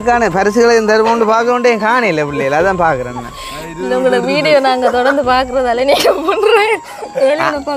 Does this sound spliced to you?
no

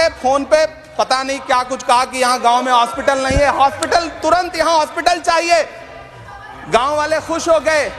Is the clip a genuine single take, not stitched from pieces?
yes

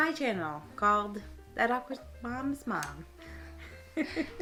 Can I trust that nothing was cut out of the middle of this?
yes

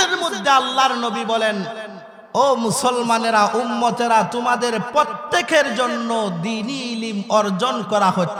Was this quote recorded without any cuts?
yes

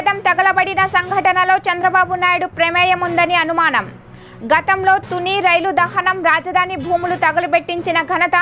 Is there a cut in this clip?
no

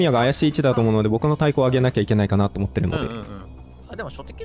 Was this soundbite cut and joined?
no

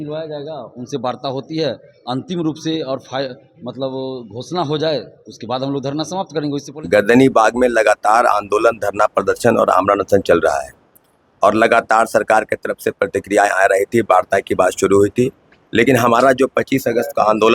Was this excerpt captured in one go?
no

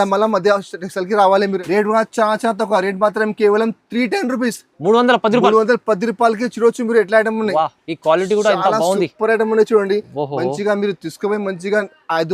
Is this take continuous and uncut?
no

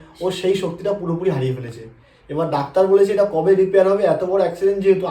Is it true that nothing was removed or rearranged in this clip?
yes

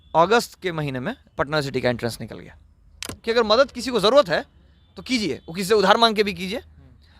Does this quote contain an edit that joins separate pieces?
yes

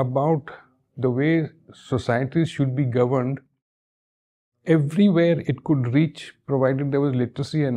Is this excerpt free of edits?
yes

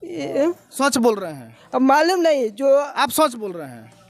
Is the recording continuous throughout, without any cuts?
yes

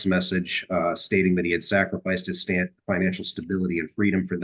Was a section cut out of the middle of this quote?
no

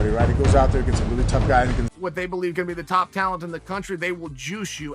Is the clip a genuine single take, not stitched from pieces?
no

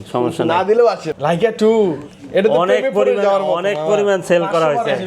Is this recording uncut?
no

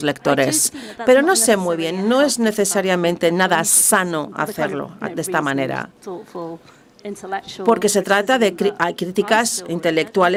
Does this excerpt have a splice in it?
no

